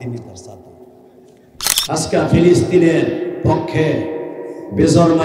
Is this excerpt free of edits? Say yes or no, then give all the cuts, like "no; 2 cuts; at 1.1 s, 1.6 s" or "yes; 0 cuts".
no; 1 cut; at 1.7 s